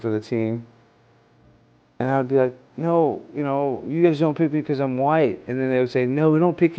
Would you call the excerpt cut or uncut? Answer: uncut